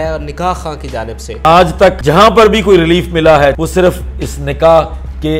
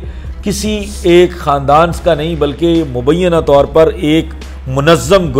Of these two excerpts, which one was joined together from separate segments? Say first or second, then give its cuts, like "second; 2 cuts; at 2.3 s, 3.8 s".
first; 3 cuts; at 1.4 s, 2.0 s, 3.6 s